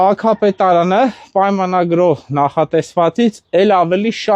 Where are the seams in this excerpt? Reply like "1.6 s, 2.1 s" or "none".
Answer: none